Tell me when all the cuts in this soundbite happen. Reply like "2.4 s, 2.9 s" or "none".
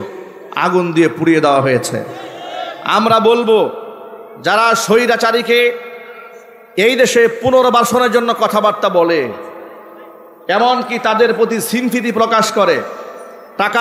none